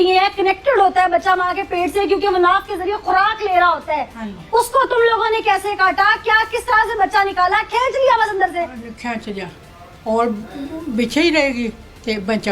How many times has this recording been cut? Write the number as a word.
zero